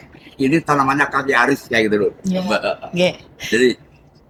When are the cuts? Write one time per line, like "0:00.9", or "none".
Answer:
none